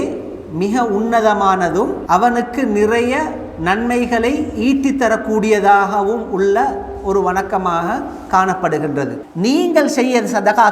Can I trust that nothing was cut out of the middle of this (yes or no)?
no